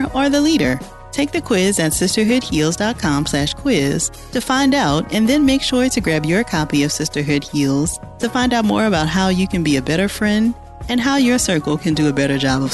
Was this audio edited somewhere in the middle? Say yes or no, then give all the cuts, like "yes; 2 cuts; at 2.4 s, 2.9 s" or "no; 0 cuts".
no; 0 cuts